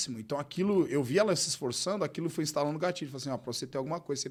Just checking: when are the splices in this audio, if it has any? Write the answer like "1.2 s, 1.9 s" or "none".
none

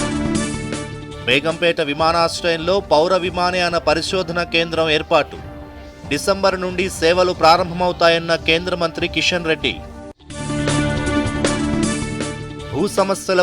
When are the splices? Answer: none

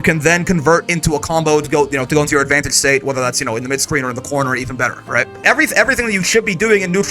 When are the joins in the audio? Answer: 5.4 s

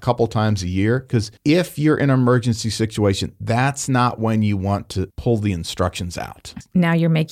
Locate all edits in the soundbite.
1.3 s

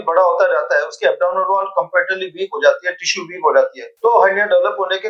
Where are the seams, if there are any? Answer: none

